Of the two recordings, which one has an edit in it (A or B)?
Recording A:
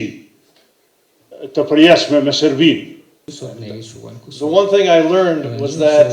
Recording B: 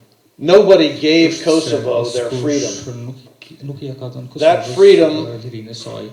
A